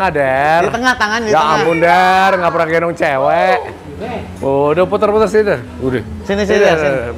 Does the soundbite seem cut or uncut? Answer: uncut